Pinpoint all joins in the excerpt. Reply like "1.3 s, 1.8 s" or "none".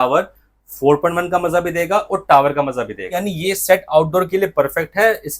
3.1 s